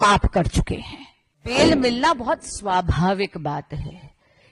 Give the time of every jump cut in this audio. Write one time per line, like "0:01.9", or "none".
0:01.4